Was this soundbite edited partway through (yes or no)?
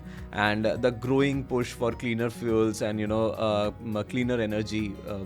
no